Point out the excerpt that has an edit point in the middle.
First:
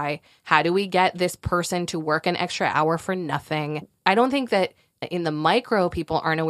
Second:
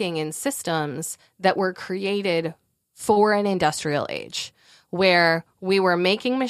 first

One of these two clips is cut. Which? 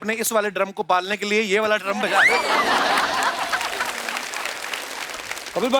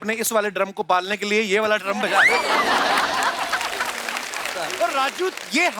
second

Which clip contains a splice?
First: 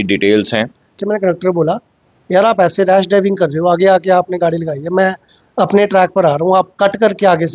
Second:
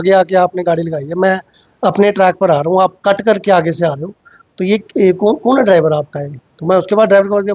first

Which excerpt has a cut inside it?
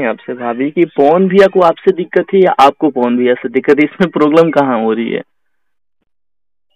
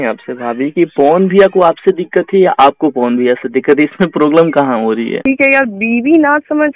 second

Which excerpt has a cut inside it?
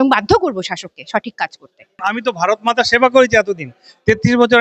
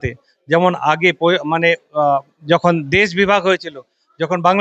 first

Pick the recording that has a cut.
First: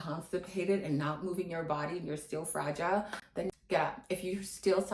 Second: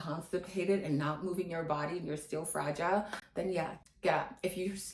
first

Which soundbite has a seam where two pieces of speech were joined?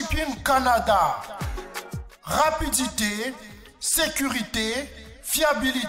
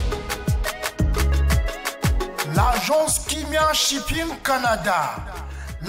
second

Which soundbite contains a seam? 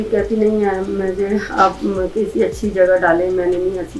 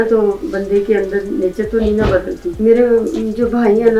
second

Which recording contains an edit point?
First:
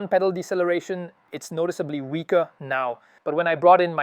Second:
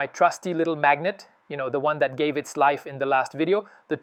first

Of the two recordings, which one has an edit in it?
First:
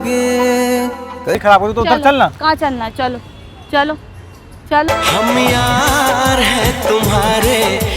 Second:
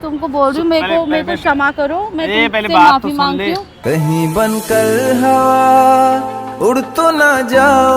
first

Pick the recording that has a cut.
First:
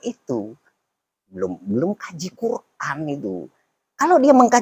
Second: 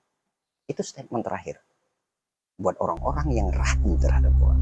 first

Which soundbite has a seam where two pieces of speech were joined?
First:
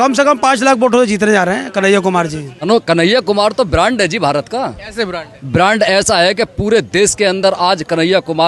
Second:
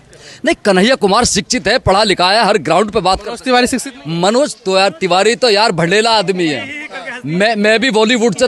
first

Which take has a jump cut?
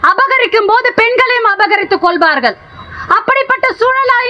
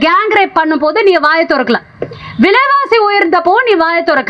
first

